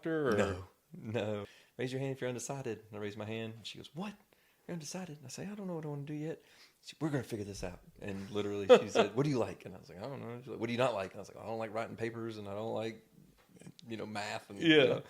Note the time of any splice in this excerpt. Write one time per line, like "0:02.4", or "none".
0:01.6